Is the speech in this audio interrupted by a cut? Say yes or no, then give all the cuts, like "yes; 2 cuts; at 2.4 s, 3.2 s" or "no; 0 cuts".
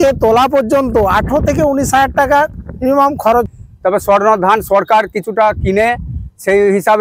yes; 1 cut; at 3.5 s